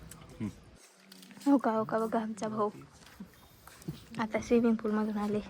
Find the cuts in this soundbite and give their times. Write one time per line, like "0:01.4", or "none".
0:01.0